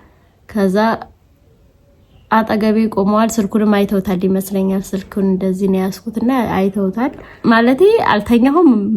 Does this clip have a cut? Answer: yes; 1 cut; at 7.3 s

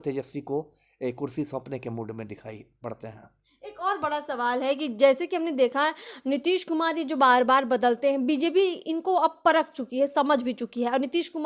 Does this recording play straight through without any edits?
yes; 0 cuts

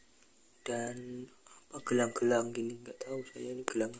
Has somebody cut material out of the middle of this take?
no; 0 cuts

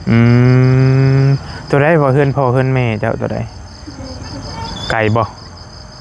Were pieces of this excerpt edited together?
no; 0 cuts

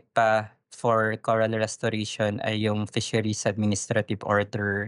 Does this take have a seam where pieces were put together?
no; 0 cuts

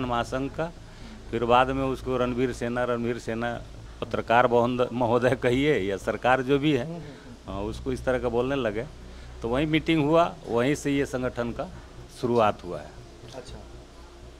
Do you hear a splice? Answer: no; 0 cuts

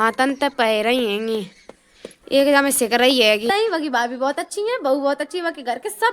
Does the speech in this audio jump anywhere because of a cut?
yes; 1 cut; at 3.5 s

